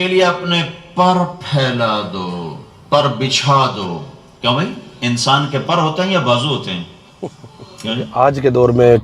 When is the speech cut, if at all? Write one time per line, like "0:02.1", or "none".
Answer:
0:08.1